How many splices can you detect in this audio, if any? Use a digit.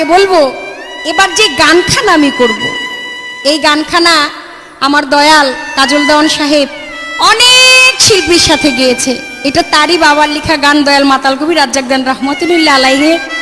1